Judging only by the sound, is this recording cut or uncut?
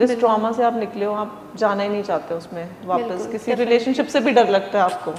uncut